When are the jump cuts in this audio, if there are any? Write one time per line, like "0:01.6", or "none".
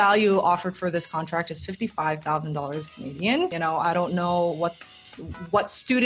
0:03.5